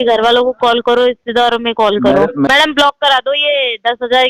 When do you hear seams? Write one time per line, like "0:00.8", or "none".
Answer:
0:02.5